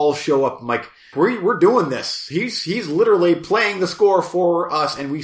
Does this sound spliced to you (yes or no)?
yes